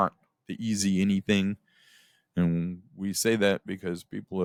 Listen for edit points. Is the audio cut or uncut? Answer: uncut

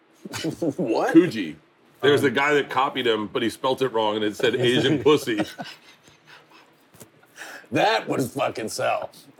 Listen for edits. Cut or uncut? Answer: cut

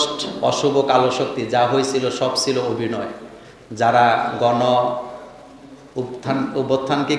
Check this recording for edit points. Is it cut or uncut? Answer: uncut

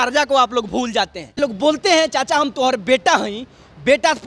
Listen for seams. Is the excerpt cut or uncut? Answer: cut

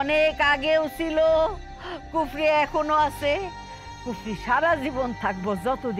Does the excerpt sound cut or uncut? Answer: uncut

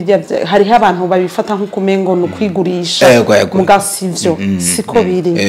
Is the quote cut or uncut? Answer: uncut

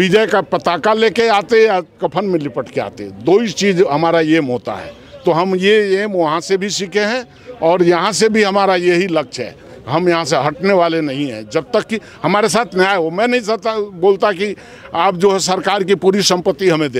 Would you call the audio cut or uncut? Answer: uncut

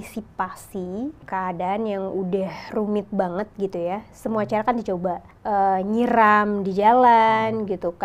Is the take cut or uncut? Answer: cut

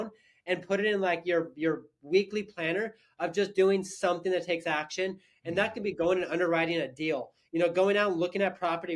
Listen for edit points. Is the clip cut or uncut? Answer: uncut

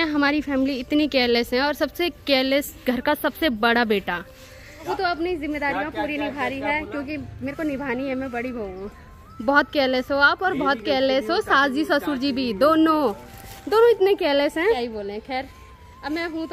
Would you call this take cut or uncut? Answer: uncut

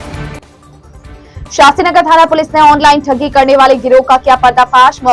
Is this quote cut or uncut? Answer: uncut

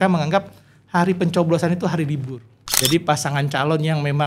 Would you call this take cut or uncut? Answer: cut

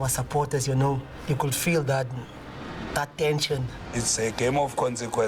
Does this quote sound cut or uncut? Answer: cut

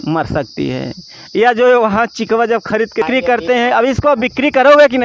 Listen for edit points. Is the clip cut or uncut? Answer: cut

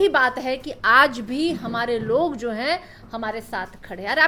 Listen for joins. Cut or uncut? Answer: uncut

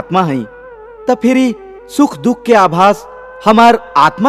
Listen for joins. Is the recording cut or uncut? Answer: uncut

